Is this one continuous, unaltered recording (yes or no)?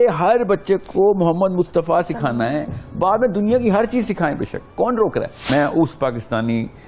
no